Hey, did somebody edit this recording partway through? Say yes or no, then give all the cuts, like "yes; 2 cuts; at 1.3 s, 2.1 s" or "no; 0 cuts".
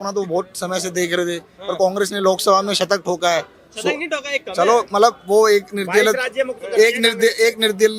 no; 0 cuts